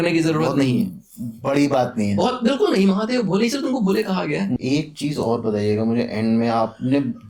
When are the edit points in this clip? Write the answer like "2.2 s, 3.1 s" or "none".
4.6 s